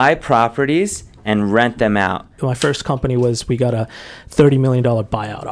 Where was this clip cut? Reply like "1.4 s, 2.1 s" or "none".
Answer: 2.4 s